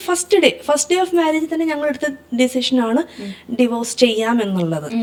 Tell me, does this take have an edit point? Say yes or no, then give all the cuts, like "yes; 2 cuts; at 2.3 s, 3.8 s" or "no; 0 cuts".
no; 0 cuts